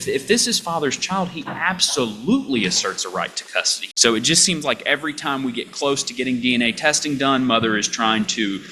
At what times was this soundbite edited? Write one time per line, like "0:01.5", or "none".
0:03.8